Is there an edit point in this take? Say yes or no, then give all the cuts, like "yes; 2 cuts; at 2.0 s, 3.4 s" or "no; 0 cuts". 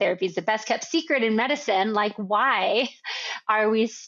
no; 0 cuts